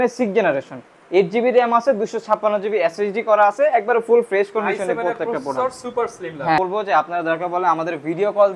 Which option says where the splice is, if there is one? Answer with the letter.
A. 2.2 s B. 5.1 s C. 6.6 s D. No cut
C